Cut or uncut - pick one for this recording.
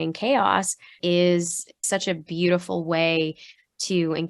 cut